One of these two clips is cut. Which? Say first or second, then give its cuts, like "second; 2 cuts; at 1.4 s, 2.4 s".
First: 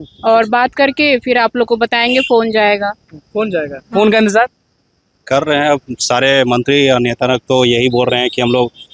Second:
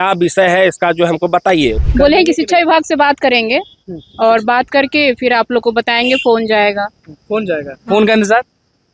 second; 1 cut; at 1.8 s